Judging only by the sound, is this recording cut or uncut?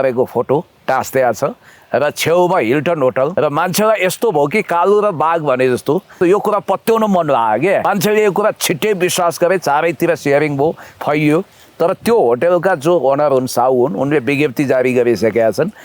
cut